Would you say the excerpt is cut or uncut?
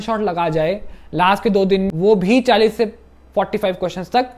cut